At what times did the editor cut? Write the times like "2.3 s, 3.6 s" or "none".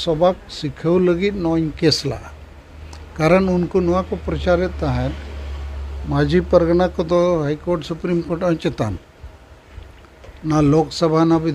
none